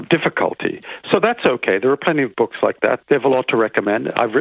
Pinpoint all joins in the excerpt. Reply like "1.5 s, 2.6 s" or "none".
3.0 s